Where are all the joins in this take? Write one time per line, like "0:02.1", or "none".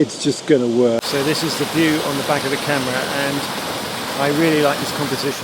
0:01.0

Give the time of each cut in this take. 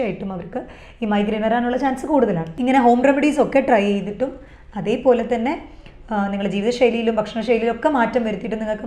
0:02.5

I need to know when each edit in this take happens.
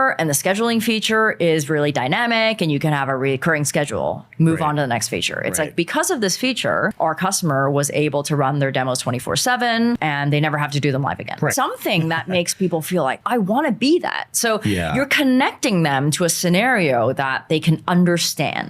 0:11.5
0:13.2

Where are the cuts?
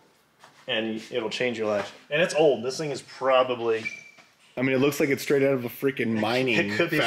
0:02.0

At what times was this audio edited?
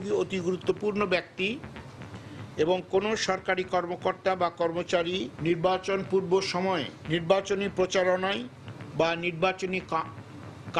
0:05.3

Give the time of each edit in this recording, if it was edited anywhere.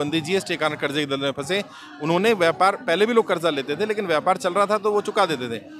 none

